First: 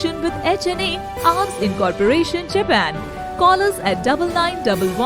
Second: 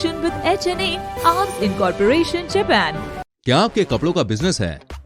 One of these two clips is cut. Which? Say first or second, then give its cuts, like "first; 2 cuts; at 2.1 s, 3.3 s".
second; 1 cut; at 3.3 s